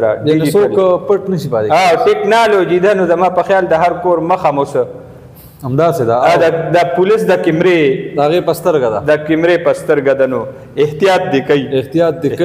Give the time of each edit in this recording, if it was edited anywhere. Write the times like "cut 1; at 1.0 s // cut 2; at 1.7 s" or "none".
none